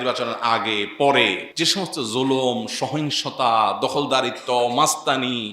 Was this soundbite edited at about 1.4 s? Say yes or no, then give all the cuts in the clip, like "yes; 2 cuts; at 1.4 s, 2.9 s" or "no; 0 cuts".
yes; 1 cut; at 1.4 s